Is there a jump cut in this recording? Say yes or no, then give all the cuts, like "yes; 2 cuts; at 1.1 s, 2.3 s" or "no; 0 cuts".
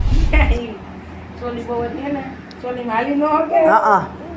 no; 0 cuts